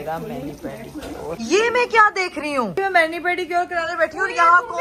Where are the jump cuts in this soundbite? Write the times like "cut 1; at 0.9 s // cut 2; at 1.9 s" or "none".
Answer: none